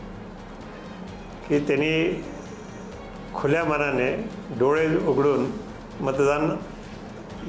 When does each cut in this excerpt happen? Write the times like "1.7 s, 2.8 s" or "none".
none